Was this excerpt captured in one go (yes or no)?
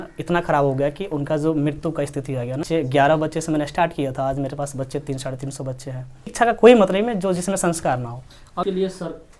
no